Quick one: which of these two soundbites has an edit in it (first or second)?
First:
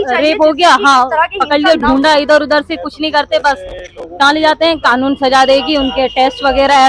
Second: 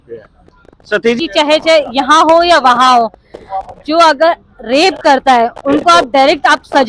second